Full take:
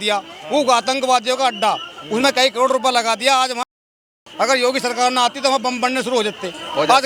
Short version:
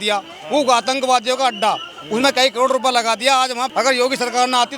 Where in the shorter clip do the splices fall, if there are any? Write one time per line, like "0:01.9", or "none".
0:03.6